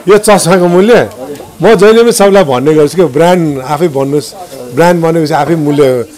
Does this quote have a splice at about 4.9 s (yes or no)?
no